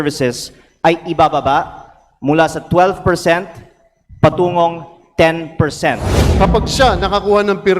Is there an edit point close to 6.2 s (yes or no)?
yes